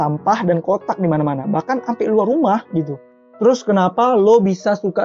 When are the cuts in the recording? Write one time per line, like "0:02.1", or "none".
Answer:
none